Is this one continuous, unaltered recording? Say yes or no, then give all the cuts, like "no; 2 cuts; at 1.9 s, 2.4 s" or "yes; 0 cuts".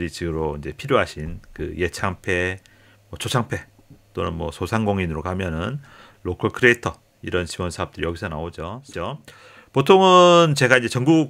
no; 1 cut; at 8.9 s